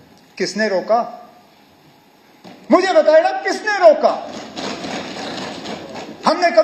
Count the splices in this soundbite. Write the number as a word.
zero